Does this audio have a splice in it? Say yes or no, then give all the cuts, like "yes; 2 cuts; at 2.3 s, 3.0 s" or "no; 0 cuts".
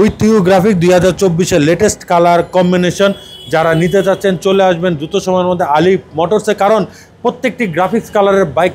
no; 0 cuts